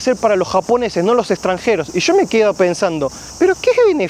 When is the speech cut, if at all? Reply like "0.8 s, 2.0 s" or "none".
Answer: 3.2 s

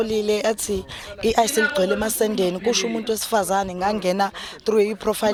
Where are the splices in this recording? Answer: none

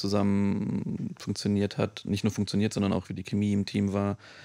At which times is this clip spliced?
none

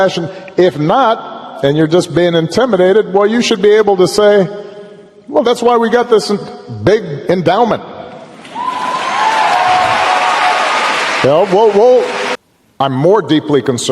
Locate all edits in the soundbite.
12.3 s

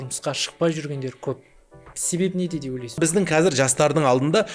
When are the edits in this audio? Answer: 3.0 s

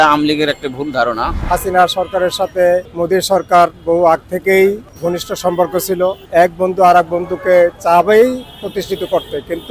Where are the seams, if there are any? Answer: 1.4 s, 2.9 s, 4.9 s, 6.2 s

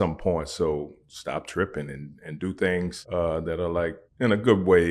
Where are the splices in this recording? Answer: 1.0 s, 3.0 s, 4.0 s

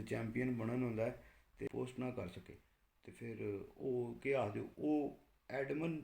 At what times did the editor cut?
1.7 s

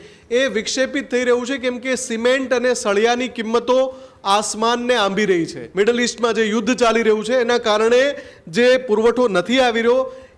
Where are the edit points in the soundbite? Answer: 5.6 s

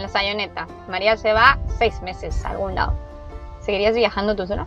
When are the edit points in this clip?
none

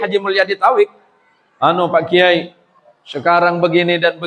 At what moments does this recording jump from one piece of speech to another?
none

